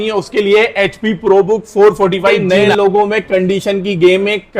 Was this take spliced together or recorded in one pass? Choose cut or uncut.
cut